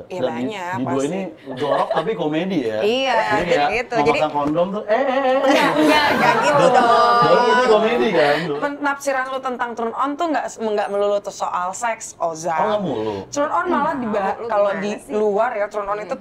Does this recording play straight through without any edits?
no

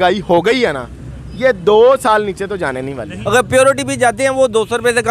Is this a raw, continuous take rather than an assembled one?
no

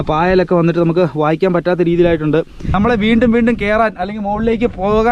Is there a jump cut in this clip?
yes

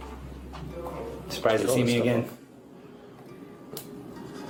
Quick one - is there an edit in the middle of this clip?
no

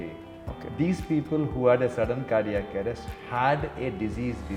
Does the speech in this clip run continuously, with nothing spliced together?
yes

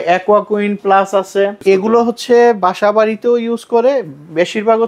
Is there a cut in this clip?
yes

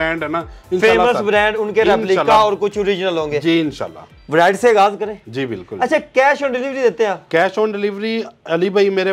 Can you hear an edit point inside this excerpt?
no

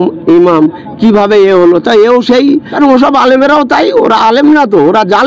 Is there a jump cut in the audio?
yes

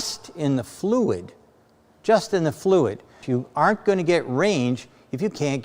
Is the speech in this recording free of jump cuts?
no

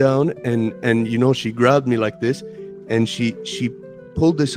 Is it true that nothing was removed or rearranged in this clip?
yes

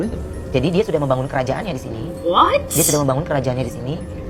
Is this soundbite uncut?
yes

